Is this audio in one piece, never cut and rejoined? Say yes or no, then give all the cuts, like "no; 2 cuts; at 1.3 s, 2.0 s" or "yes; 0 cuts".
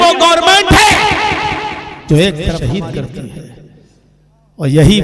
no; 1 cut; at 2.6 s